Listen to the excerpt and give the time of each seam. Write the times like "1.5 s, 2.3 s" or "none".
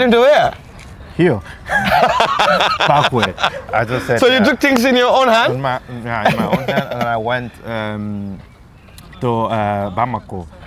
none